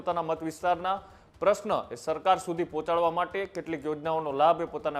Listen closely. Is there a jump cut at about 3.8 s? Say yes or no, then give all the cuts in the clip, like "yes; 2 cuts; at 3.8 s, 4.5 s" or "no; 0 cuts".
no; 0 cuts